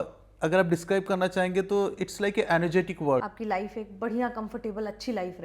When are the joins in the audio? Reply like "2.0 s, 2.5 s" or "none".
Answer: 3.3 s